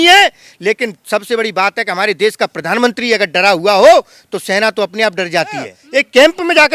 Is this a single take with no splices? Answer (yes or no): no